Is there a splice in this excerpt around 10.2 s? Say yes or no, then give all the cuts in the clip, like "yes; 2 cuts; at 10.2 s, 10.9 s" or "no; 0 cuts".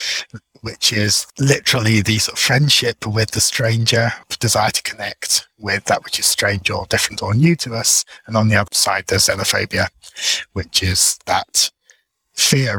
no; 2 cuts; at 4.3 s, 8.7 s